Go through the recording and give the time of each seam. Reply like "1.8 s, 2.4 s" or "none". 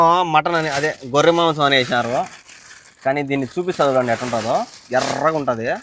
none